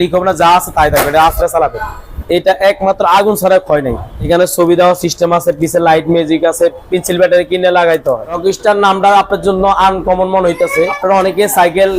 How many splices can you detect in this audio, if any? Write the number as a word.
three